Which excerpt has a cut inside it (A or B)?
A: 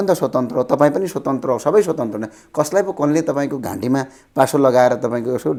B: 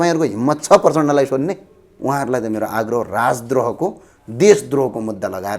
B